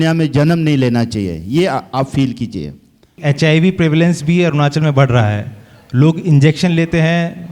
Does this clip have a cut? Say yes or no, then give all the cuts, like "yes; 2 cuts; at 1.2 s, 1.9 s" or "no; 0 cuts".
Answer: yes; 1 cut; at 3.2 s